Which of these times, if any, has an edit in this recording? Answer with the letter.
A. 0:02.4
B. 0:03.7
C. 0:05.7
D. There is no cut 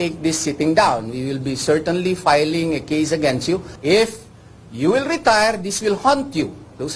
B